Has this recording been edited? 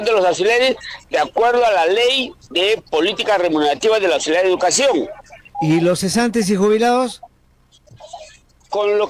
yes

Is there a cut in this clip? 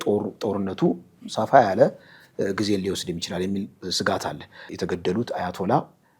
yes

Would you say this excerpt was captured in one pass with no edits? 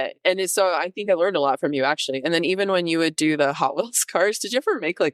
yes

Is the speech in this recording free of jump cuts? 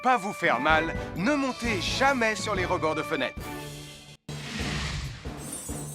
no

